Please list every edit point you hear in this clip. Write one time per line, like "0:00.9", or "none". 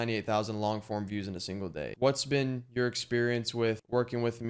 0:01.9